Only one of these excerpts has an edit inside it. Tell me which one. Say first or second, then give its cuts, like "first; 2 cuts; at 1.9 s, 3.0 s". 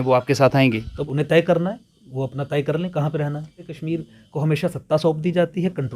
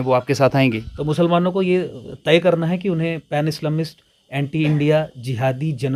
first; 2 cuts; at 0.9 s, 3.7 s